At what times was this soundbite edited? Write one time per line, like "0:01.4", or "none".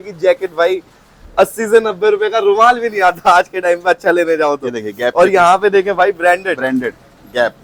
none

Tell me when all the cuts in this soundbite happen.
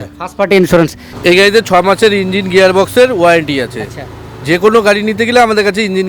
0:01.1

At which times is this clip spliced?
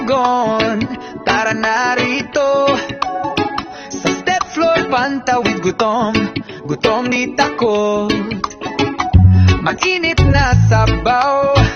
0:07.1

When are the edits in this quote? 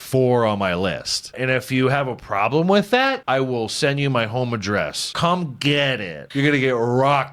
0:01.4
0:03.2
0:05.0
0:06.2

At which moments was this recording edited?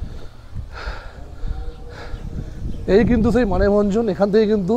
none

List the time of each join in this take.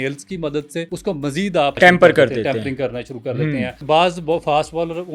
0:00.9
0:01.8
0:03.8

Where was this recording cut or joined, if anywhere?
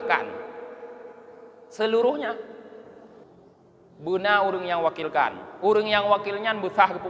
0:03.1

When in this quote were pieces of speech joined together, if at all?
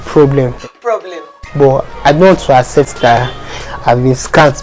none

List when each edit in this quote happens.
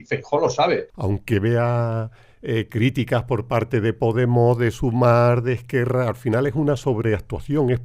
0:00.9

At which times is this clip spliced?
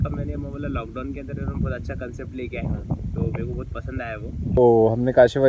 0:04.6

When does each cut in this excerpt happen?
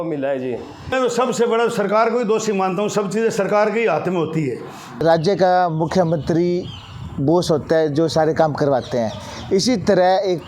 0:00.9
0:04.9

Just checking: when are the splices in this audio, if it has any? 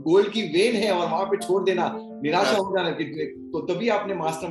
none

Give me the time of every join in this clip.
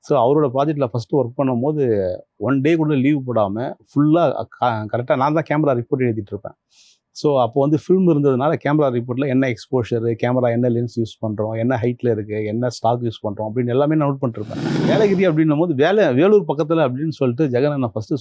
0:14.8

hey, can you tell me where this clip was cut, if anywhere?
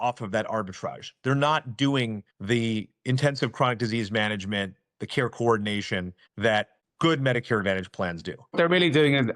0:08.4

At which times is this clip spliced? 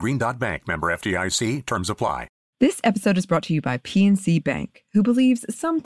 0:02.4

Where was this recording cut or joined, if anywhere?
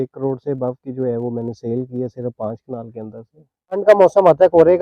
0:03.8

